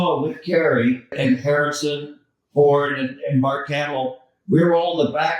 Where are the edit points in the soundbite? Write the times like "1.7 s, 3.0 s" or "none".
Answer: 1.1 s